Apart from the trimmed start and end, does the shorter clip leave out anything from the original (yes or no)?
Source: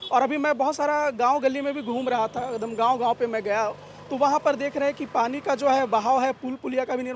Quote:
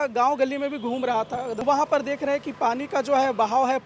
yes